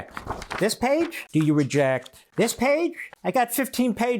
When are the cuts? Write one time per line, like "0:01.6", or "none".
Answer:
0:01.2
0:02.2
0:03.1